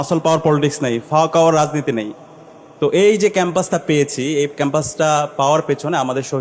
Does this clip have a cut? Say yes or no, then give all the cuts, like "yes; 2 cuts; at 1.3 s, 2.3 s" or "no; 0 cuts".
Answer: no; 0 cuts